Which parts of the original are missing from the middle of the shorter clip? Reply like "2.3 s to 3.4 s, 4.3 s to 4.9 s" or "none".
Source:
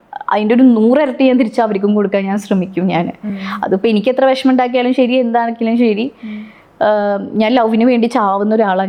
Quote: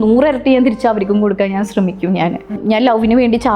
3.3 s to 7.3 s